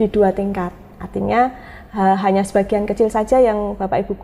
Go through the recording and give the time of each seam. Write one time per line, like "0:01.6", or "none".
none